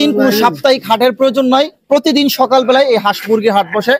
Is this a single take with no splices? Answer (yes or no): yes